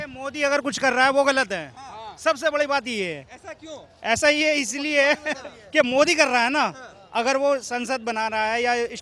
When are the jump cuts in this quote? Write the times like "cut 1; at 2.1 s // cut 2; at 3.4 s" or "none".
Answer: none